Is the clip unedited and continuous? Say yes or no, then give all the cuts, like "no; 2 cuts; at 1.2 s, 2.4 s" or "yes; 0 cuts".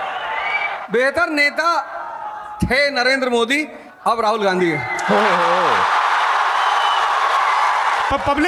yes; 0 cuts